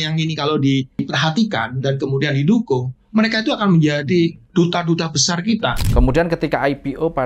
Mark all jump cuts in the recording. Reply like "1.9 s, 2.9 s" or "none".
1.0 s, 5.8 s